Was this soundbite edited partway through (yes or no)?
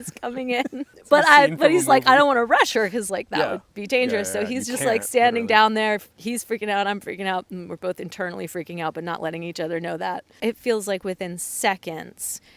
yes